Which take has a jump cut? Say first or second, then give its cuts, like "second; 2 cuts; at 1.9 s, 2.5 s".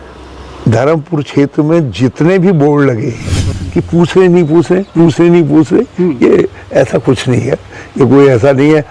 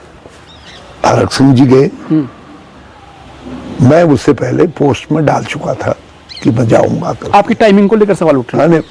first; 1 cut; at 3.6 s